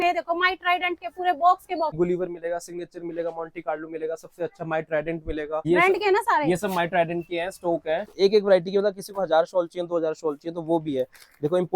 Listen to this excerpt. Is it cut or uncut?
cut